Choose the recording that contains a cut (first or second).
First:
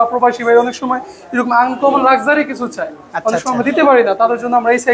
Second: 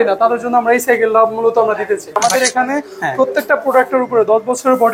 second